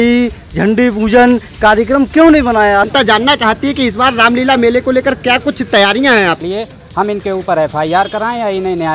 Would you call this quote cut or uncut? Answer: cut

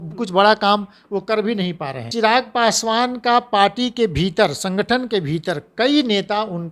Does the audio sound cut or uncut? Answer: cut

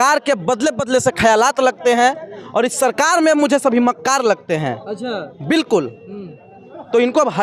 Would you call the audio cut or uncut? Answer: uncut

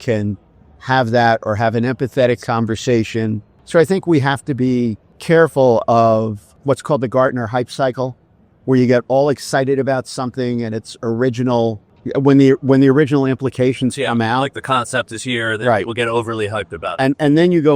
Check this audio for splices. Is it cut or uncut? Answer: cut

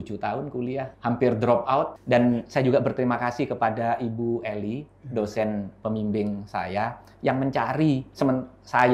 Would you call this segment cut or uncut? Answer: cut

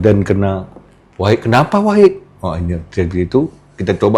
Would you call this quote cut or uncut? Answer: uncut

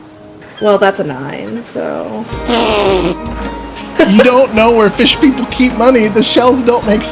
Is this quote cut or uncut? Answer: uncut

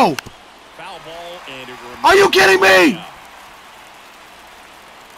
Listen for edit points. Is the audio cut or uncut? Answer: uncut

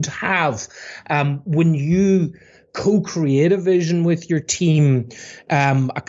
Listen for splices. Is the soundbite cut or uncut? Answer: uncut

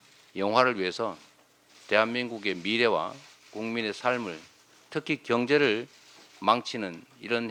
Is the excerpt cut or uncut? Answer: uncut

